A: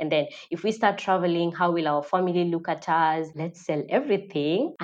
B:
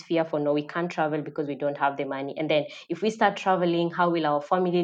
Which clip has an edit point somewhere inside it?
A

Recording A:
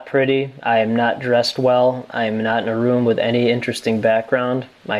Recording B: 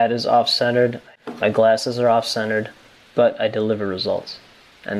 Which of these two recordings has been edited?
B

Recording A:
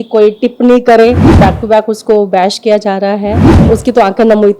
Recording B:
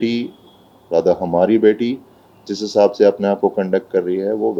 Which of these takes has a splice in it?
A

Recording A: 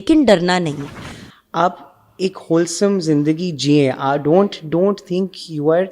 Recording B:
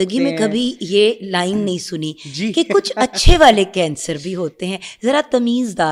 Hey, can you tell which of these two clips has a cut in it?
A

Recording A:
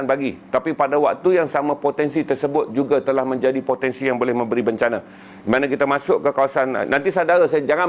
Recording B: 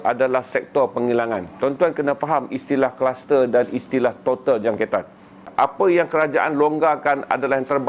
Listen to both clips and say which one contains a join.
B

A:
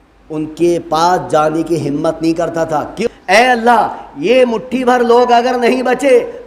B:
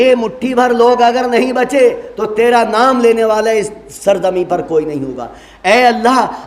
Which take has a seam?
A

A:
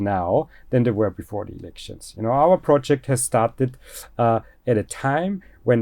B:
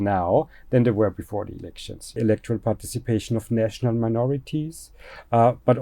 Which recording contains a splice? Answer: B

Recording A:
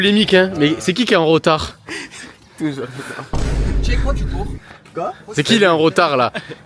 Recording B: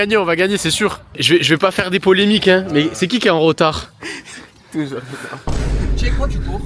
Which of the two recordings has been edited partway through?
B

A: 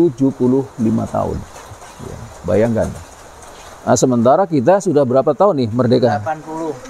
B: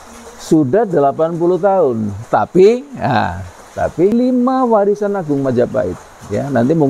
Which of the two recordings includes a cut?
B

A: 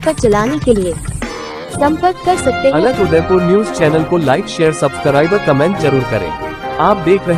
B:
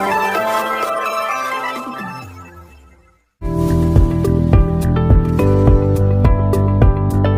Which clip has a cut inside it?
B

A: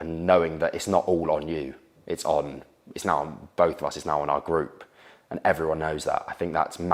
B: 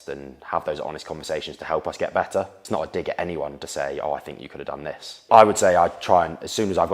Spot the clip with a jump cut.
B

